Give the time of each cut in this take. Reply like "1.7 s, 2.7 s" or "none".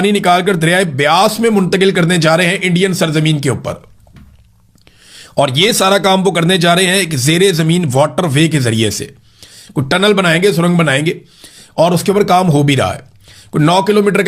none